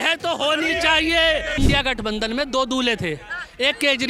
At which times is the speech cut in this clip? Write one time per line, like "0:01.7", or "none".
0:01.5

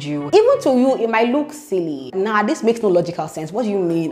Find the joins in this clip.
none

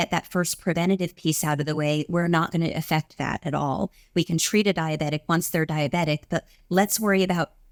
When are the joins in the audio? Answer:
none

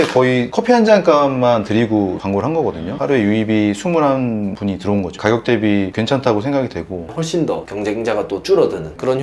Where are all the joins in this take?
0:02.9
0:07.1

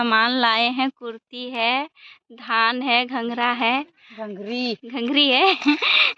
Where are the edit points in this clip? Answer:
none

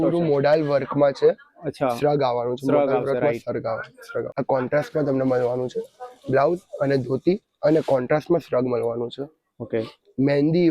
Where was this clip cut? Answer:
0:04.3

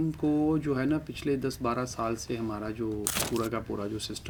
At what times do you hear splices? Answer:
none

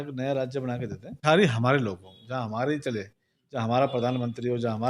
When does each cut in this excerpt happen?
0:01.2

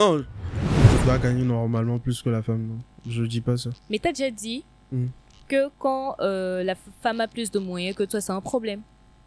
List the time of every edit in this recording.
0:00.9

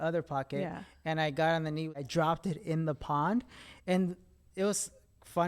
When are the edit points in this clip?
0:02.0

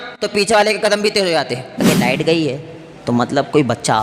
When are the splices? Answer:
0:01.8

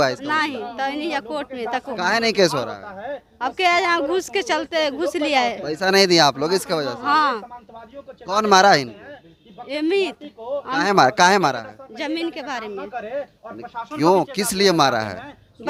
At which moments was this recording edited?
none

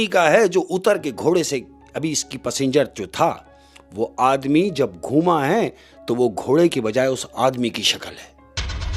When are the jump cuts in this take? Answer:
none

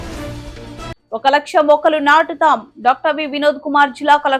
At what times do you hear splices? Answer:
0:00.9

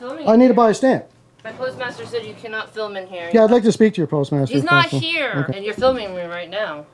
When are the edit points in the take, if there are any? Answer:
0:01.5
0:05.5

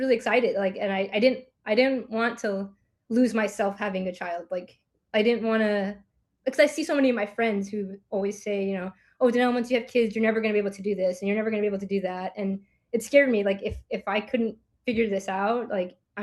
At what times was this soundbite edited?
none

